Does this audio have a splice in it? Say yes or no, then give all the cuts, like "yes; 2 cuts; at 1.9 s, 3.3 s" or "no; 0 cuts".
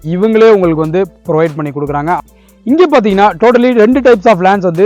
yes; 1 cut; at 2.2 s